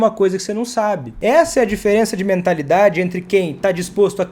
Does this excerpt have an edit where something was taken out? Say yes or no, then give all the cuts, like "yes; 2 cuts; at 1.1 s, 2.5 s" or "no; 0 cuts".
yes; 1 cut; at 1.1 s